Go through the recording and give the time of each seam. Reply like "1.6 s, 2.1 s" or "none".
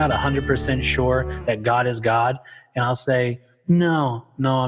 none